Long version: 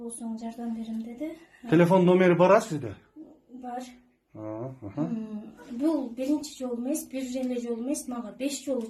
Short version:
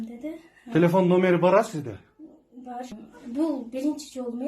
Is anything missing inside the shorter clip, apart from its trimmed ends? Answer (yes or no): yes